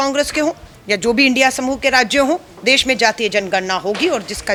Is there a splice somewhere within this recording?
no; 0 cuts

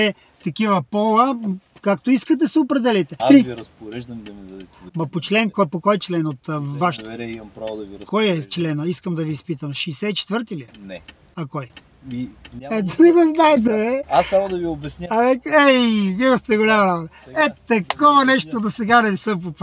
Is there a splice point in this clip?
yes; 1 cut; at 3.2 s

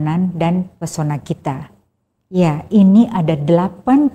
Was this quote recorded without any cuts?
yes; 0 cuts

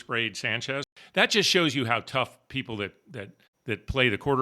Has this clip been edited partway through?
yes; 1 cut; at 0.9 s

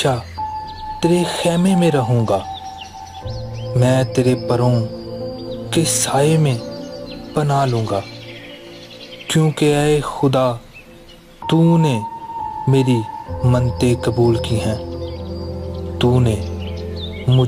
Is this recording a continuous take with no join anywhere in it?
yes; 0 cuts

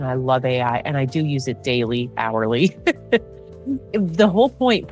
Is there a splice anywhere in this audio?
no; 0 cuts

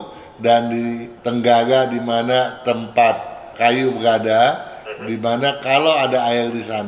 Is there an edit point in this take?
yes; 1 cut; at 1.1 s

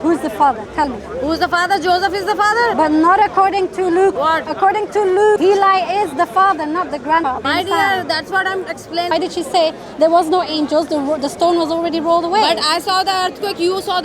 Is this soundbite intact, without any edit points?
no; 5 cuts; at 2.7 s, 4.2 s, 5.4 s, 7.3 s, 9.1 s

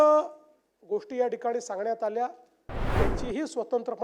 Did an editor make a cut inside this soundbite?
yes; 1 cut; at 2.8 s

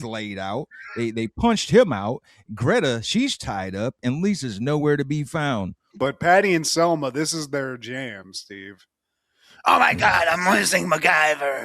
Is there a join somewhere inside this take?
yes; 1 cut; at 5.8 s

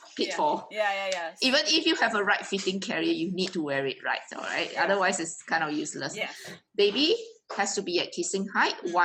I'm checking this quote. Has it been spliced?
no; 0 cuts

